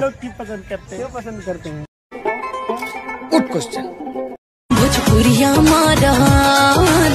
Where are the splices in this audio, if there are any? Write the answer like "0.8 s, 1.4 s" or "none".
none